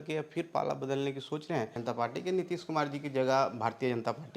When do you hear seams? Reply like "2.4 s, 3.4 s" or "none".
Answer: 1.8 s